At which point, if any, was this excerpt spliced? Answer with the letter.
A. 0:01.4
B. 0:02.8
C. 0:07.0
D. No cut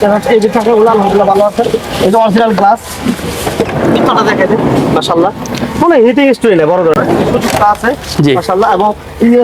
C